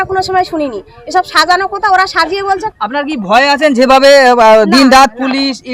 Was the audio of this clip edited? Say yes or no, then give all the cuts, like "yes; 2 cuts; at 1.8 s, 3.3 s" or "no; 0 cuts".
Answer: no; 0 cuts